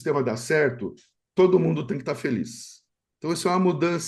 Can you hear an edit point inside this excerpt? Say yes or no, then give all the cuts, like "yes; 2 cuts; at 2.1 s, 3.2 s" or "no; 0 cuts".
no; 0 cuts